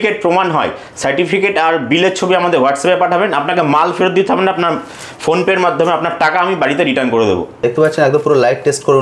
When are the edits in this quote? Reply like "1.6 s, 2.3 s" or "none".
7.6 s